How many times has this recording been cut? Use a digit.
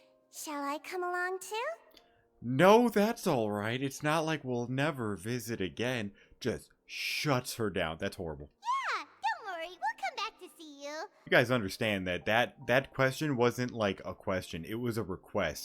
2